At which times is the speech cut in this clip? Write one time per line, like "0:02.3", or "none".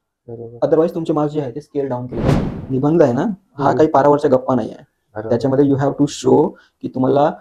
0:02.5